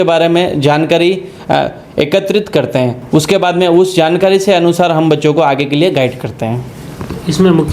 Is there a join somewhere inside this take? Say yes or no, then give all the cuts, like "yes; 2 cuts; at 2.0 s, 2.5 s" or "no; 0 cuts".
no; 0 cuts